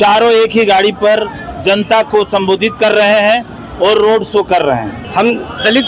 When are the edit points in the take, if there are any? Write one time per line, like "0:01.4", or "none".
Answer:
0:05.0